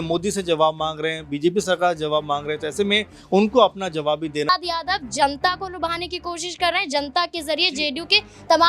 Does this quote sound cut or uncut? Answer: cut